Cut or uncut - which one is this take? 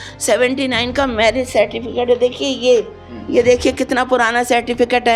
uncut